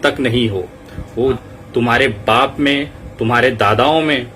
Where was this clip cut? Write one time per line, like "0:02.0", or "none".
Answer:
0:01.4